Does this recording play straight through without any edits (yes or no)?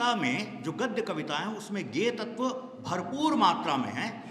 yes